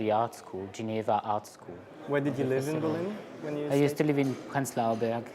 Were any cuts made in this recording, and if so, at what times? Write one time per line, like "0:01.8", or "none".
none